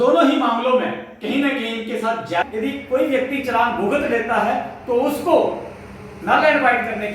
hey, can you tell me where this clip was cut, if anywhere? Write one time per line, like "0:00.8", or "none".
0:02.4